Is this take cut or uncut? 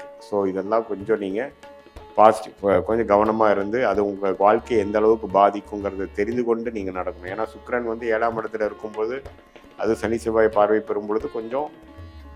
uncut